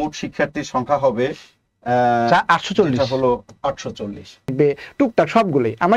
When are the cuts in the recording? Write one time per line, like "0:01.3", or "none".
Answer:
0:04.5